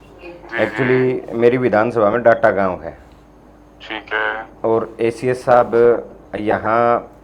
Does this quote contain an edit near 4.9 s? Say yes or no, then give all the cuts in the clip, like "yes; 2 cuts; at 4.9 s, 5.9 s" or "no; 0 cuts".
no; 0 cuts